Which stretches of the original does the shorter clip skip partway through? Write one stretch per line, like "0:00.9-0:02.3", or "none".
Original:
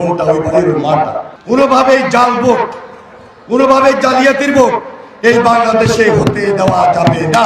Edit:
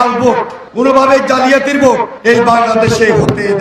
0:03.1-0:03.6
0:04.8-0:05.1